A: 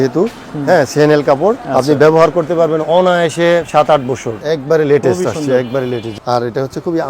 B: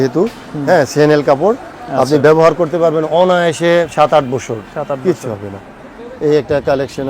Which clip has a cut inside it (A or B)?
A